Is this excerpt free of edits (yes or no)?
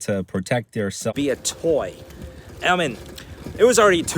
no